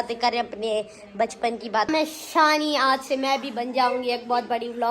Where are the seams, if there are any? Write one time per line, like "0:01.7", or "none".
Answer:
0:01.9